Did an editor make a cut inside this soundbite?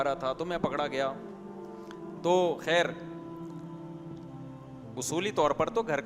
yes; 2 cuts; at 3.4 s, 4.9 s

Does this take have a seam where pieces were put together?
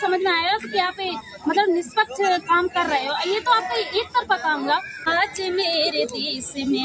yes; 1 cut; at 4.9 s

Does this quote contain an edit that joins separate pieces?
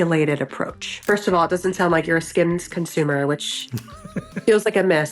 yes; 1 cut; at 0.9 s

